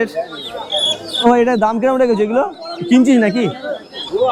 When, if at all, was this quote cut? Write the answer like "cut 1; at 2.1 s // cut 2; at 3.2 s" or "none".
none